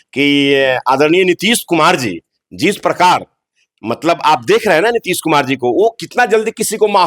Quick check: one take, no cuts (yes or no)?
yes